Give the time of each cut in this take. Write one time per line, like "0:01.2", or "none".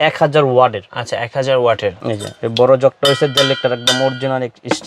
0:02.0